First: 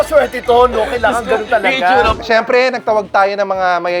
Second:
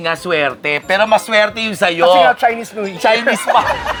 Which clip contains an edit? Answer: first; 1 cut; at 2.2 s

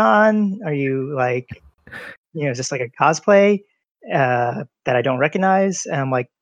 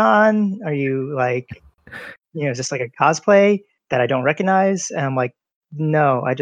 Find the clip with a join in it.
second; 1 cut; at 3.8 s

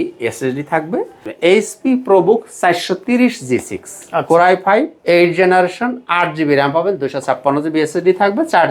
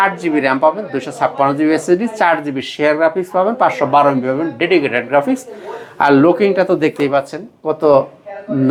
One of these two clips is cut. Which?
first; 2 cuts; at 1.2 s, 4.9 s

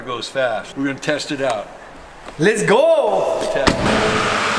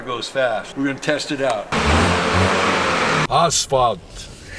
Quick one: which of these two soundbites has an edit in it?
second; 2 cuts; at 1.7 s, 3.3 s

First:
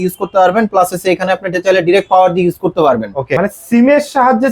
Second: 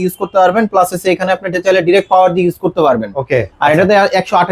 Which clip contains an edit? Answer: first; 1 cut; at 3.3 s

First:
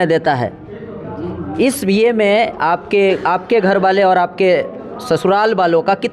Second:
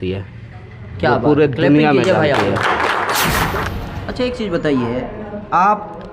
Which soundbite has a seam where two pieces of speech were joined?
second; 1 cut; at 3.6 s

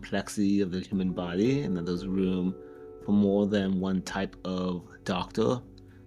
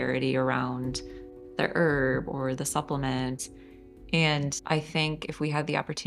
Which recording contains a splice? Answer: second; 2 cuts; at 3.4 s, 4.6 s

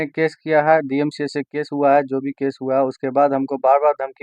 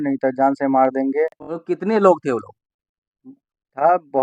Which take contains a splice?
second; 1 cut; at 1.5 s

